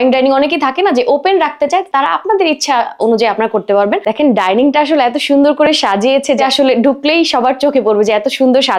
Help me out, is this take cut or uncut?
cut